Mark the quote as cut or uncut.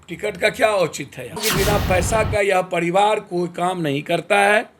cut